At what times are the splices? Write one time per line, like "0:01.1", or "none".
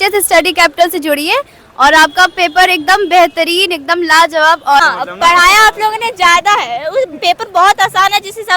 0:04.8